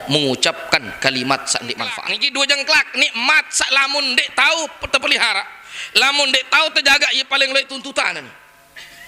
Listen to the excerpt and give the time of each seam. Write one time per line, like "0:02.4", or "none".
0:01.9